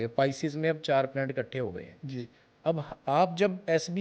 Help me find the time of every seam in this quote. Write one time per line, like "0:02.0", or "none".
none